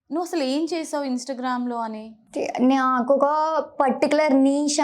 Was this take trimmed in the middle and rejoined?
yes; 1 cut; at 2.2 s

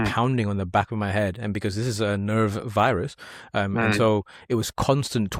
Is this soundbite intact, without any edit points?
yes; 0 cuts

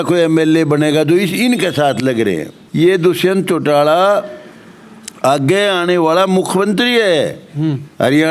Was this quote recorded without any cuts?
no; 1 cut; at 2.6 s

